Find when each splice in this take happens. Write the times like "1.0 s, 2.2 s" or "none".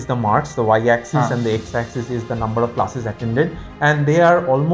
none